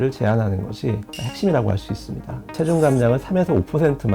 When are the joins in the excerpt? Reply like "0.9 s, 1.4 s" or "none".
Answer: 1.1 s, 2.5 s